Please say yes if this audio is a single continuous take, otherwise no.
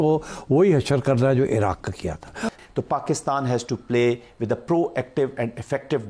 no